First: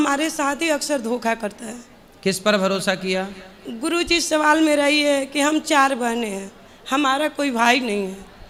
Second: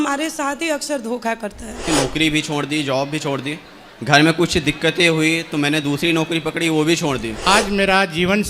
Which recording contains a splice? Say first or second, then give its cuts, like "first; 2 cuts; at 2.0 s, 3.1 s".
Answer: second; 2 cuts; at 1.9 s, 7.4 s